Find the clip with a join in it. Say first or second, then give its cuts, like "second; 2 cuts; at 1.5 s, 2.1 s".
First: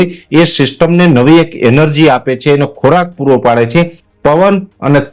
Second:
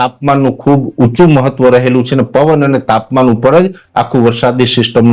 first; 1 cut; at 4.0 s